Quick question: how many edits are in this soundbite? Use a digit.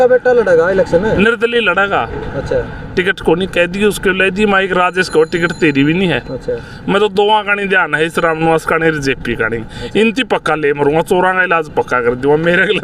0